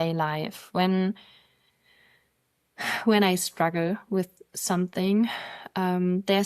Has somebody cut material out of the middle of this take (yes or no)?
no